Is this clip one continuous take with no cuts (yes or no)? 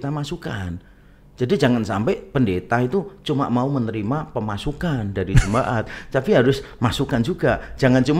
yes